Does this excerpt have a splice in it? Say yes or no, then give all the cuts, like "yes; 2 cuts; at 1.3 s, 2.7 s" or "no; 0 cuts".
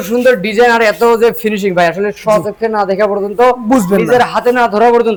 no; 0 cuts